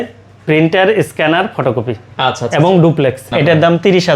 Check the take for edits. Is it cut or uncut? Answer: cut